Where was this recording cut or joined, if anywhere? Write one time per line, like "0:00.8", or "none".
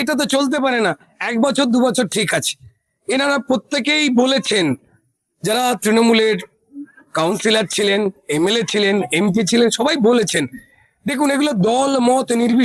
none